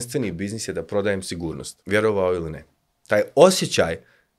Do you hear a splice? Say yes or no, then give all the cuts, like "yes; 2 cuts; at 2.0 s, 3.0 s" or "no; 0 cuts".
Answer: yes; 1 cut; at 1.7 s